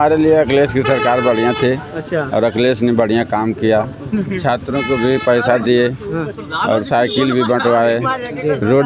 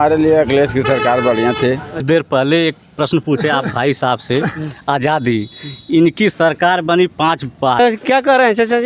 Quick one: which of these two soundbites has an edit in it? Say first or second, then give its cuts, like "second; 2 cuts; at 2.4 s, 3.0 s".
second; 2 cuts; at 2.0 s, 7.8 s